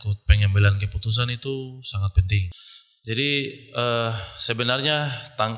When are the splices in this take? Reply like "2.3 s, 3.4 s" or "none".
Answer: 2.6 s